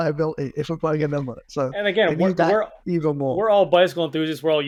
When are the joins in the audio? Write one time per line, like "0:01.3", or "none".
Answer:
none

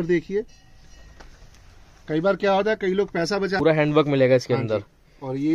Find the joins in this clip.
0:03.6

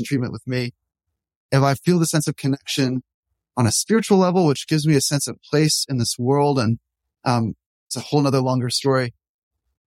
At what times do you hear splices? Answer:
none

